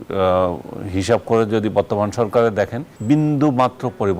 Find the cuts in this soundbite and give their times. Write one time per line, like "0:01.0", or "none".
0:02.9